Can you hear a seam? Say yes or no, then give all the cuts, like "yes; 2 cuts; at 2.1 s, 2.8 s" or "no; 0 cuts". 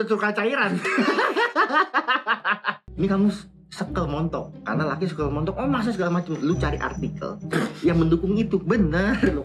yes; 1 cut; at 2.8 s